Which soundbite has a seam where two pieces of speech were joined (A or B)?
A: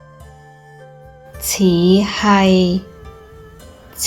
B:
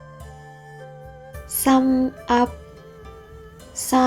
B